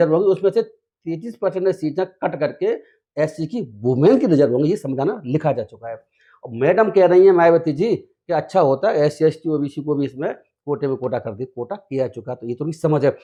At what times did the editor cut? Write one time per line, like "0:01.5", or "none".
none